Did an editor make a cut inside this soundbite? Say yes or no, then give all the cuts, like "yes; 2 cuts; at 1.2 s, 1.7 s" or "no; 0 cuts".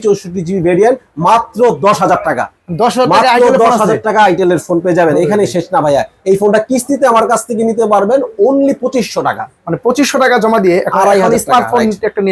no; 0 cuts